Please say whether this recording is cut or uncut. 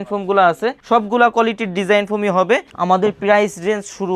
cut